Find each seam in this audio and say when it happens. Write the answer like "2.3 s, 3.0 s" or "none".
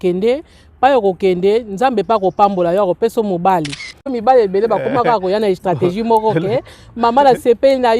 4.2 s